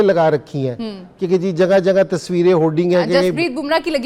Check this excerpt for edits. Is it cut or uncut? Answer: uncut